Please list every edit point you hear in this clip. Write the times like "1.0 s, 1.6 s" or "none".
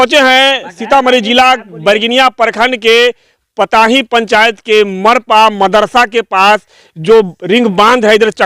none

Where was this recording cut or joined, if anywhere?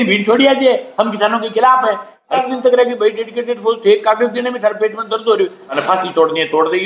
2.4 s, 5.6 s

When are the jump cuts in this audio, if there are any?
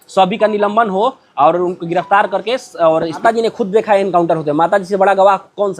3.2 s

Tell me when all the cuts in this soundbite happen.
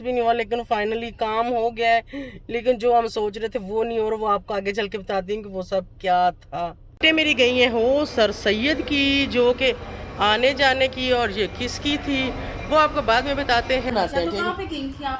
6.8 s, 13.9 s

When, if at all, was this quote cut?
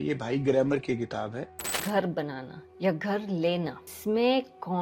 1.8 s, 3.9 s

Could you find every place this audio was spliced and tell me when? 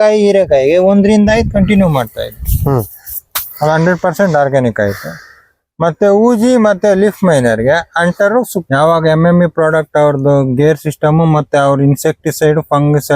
8.6 s

